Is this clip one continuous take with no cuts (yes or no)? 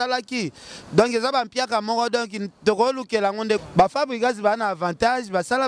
no